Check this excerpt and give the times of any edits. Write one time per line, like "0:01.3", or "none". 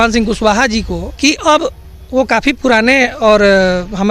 0:01.0